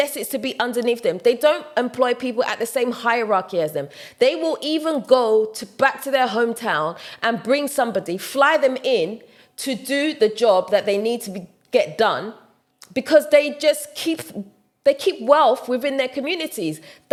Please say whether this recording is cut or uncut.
uncut